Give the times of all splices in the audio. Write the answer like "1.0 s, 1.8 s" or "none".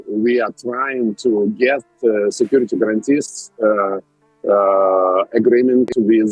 none